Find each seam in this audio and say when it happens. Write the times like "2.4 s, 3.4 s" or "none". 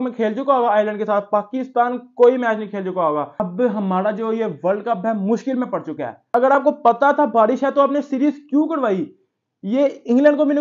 3.4 s, 6.2 s

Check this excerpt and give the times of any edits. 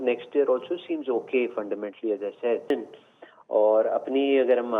2.7 s

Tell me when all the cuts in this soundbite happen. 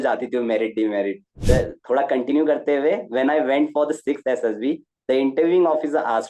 1.3 s

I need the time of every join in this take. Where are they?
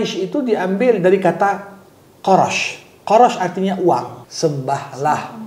4.2 s

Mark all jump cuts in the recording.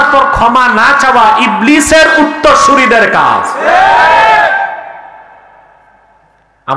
none

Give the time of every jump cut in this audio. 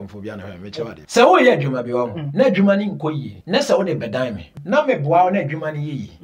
1.0 s, 2.2 s, 3.3 s, 4.5 s

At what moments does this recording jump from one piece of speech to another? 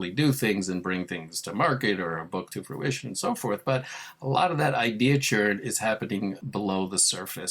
6.4 s

